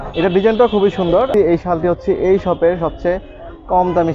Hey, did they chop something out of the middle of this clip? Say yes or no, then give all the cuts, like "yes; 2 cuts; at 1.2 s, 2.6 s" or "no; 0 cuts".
yes; 1 cut; at 1.3 s